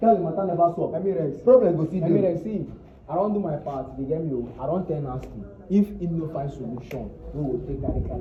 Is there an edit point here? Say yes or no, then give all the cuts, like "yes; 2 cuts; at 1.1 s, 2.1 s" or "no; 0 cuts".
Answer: no; 0 cuts